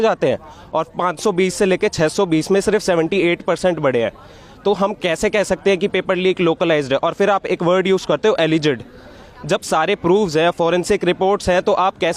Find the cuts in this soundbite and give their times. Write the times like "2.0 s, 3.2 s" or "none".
none